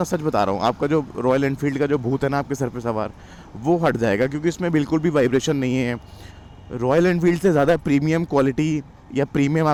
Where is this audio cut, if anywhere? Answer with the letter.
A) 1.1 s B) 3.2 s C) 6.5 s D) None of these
D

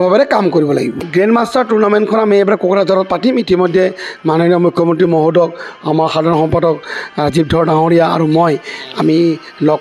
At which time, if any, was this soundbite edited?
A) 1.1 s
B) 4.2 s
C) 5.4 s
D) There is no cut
A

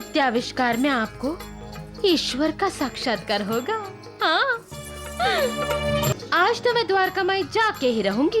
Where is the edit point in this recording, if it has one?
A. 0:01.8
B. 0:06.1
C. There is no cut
B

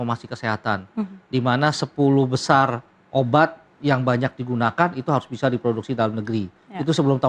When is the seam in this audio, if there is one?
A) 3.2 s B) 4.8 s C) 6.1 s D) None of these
D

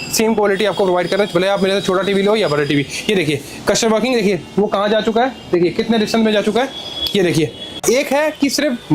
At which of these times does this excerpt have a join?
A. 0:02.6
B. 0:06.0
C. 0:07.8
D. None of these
C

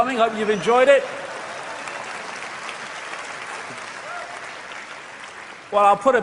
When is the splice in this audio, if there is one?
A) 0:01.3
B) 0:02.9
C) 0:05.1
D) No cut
C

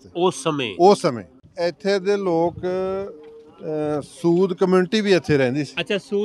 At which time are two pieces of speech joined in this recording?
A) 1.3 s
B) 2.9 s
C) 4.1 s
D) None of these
A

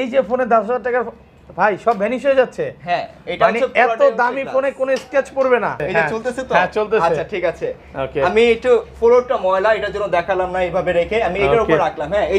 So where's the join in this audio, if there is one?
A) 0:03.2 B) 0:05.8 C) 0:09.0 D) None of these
B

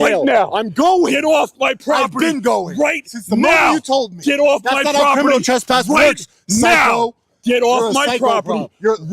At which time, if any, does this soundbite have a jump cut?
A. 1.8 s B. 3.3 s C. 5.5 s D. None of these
D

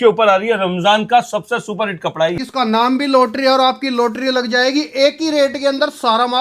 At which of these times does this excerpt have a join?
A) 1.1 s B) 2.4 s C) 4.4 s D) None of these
B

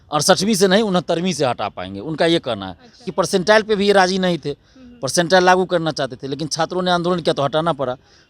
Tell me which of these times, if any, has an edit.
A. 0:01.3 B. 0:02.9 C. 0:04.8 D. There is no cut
B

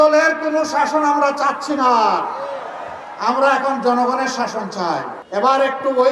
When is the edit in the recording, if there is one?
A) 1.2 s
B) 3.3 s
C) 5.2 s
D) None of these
C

